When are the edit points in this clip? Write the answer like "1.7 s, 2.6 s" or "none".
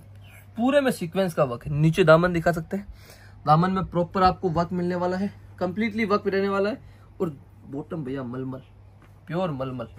none